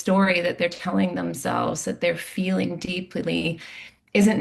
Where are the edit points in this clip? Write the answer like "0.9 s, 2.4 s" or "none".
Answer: none